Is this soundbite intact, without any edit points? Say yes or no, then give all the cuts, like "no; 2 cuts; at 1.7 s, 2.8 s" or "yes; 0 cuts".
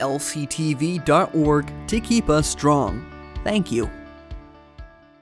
no; 1 cut; at 3.9 s